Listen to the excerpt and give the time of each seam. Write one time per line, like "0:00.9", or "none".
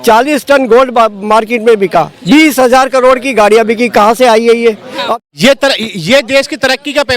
0:05.1